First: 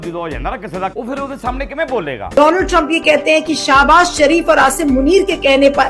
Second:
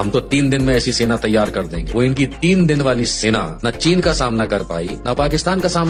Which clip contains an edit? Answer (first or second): first